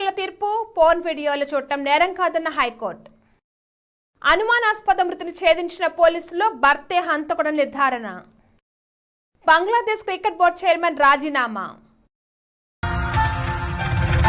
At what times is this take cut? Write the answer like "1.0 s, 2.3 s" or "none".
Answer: 12.8 s